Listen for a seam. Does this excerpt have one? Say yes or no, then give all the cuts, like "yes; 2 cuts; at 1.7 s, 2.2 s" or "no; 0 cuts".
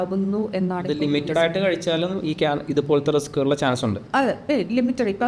no; 0 cuts